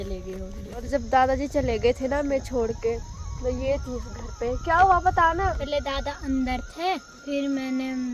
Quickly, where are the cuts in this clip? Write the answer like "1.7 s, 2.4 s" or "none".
0.9 s, 5.6 s, 7.2 s